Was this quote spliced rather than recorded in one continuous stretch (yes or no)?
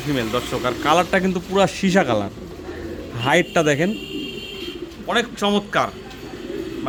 no